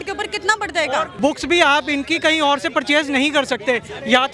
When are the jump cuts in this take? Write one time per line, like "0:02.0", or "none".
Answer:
0:01.2